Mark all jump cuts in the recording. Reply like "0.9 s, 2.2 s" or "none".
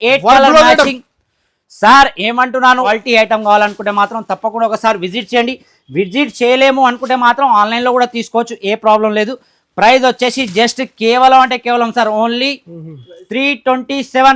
2.9 s